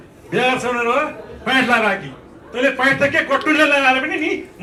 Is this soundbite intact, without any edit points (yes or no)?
yes